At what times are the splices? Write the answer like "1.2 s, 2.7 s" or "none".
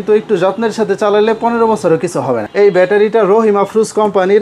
2.5 s

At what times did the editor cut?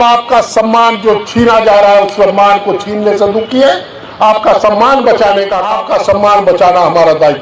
5.7 s

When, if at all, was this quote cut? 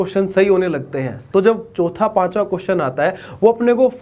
none

